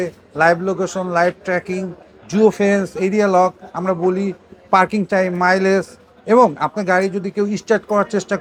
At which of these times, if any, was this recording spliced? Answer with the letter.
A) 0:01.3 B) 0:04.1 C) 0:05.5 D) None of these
D